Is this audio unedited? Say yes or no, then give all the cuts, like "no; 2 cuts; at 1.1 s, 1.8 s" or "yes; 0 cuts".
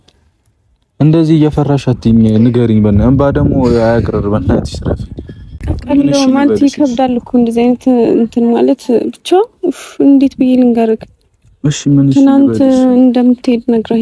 yes; 0 cuts